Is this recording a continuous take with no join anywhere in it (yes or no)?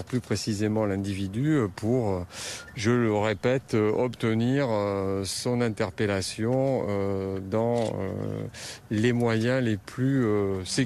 yes